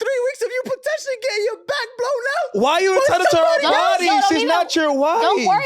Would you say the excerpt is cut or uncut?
uncut